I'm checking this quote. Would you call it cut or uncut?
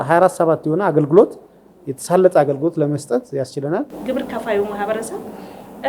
cut